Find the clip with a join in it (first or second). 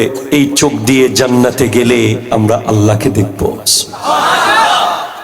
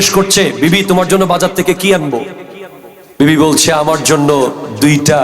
second